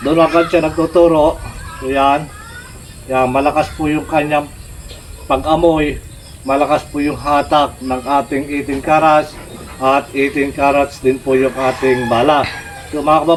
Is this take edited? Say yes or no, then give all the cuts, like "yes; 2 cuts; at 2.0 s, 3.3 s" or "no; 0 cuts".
no; 0 cuts